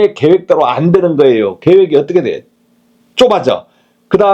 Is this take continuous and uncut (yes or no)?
yes